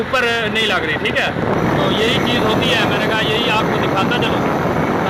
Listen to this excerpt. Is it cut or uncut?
uncut